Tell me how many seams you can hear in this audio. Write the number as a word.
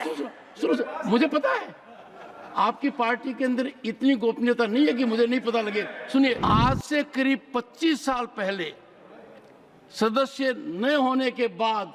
one